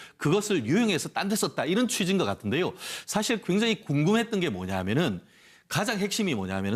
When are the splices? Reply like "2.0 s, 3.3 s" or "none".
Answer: 3.2 s